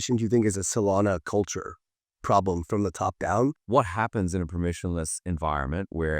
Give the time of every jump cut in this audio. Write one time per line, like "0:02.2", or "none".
0:03.6